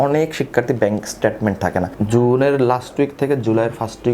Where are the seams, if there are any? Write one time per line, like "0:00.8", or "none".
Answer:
0:01.9